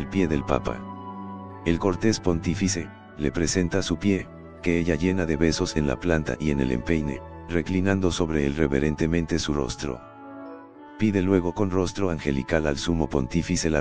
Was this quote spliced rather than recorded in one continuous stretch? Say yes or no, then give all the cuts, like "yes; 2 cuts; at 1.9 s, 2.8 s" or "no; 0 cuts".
no; 0 cuts